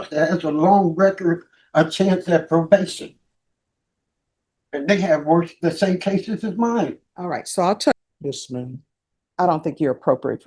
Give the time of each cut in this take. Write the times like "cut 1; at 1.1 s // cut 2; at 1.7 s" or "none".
cut 1; at 7.9 s